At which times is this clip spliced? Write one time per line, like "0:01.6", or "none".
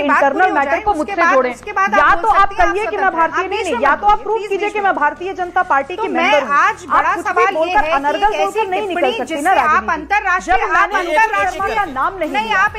none